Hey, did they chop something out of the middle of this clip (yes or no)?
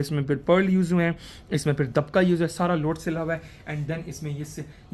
no